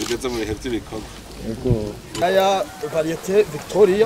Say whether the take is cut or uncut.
cut